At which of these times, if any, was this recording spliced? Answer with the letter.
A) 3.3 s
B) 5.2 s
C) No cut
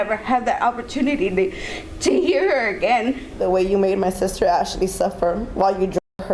A